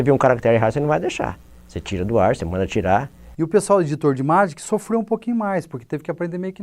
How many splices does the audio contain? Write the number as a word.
one